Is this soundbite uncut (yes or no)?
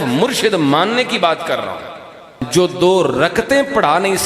no